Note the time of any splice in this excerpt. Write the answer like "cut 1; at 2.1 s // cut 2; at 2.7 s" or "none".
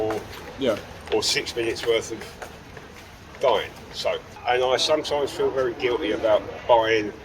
cut 1; at 4.3 s